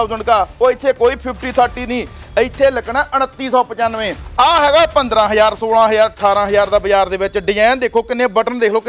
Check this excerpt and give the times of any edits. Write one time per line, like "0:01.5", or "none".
0:04.2